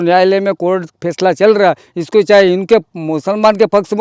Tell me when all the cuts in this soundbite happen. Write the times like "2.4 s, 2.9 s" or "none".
none